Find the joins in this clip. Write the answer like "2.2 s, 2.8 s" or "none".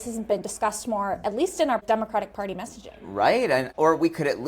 1.8 s